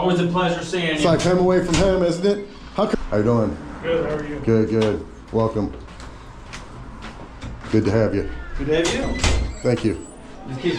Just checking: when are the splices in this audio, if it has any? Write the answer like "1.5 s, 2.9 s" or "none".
2.9 s

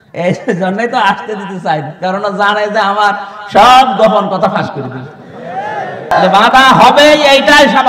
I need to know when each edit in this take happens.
6.1 s

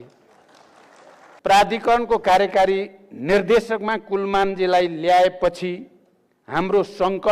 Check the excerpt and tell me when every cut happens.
1.4 s

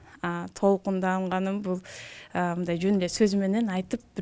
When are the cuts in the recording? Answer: none

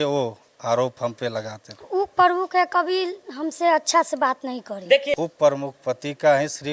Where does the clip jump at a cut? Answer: 1.8 s, 5.1 s

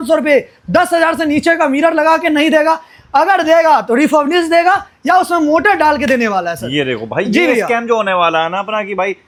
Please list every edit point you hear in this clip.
none

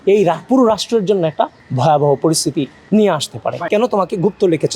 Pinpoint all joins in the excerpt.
3.8 s

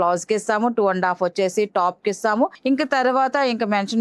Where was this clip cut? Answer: none

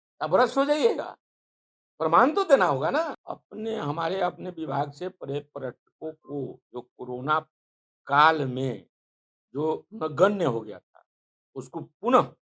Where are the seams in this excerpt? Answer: 3.3 s

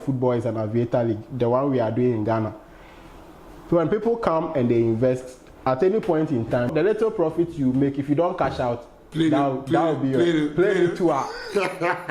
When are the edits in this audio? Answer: 6.7 s

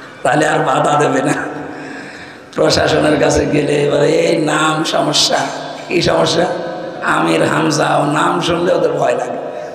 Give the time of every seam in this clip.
none

